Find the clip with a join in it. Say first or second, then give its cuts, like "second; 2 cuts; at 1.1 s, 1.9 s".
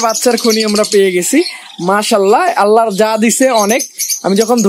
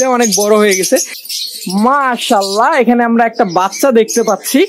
second; 1 cut; at 1.2 s